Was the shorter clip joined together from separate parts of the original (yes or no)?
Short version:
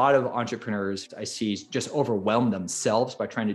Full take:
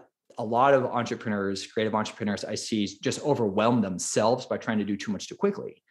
yes